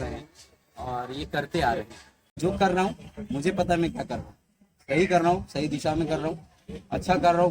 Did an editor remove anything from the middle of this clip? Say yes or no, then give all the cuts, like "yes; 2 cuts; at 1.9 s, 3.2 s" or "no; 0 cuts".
yes; 1 cut; at 2.4 s